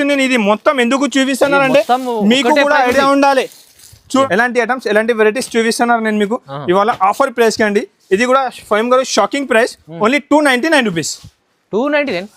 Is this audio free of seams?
no; 1 cut; at 4.2 s

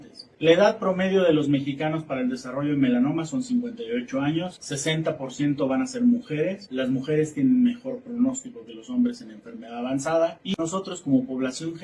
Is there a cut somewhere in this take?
yes; 1 cut; at 10.6 s

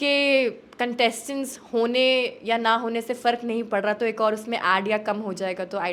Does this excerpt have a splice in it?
no; 0 cuts

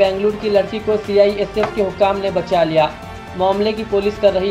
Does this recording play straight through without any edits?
yes; 0 cuts

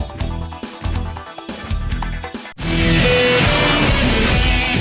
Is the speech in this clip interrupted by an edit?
no; 0 cuts

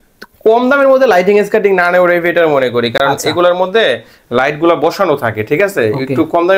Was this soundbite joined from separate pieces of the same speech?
no; 0 cuts

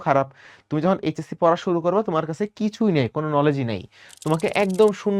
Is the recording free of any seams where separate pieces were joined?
yes; 0 cuts

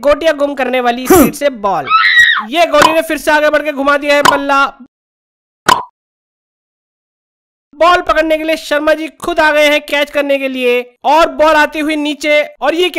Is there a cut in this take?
no; 0 cuts

